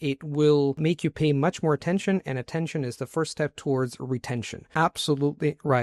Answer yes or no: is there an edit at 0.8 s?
yes